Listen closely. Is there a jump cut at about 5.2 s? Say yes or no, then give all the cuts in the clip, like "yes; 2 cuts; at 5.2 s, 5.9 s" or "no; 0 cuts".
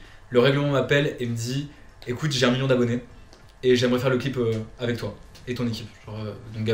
no; 0 cuts